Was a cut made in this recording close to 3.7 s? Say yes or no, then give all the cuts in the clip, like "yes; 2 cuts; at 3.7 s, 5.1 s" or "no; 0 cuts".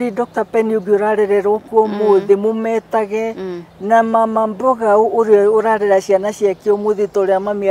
no; 0 cuts